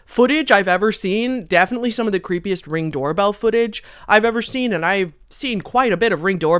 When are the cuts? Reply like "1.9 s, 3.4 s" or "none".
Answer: none